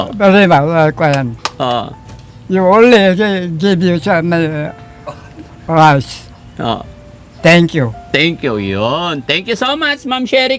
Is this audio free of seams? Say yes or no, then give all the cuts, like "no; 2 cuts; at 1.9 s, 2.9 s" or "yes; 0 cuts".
yes; 0 cuts